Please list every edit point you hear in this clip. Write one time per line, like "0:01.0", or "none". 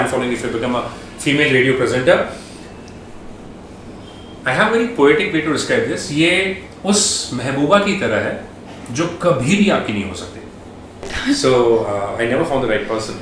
0:11.1